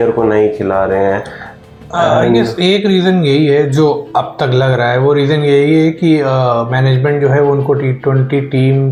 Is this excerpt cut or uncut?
uncut